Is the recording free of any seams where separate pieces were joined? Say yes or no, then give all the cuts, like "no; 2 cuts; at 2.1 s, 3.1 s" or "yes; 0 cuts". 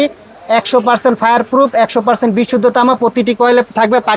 yes; 0 cuts